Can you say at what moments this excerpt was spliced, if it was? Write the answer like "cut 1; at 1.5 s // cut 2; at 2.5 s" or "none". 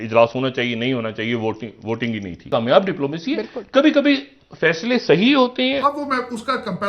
cut 1; at 2.3 s // cut 2; at 5.8 s